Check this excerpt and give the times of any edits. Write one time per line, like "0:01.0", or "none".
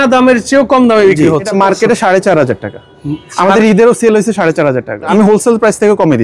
0:01.5
0:05.1